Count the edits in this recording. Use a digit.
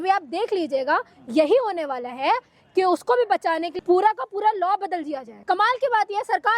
2